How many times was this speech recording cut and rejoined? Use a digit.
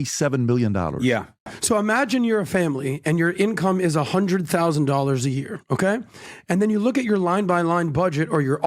1